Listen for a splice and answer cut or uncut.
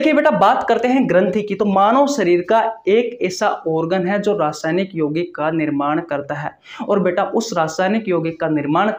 uncut